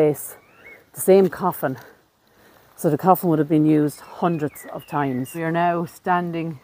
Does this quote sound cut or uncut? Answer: cut